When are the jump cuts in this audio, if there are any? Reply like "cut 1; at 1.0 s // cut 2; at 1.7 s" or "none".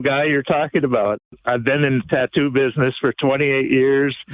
cut 1; at 1.2 s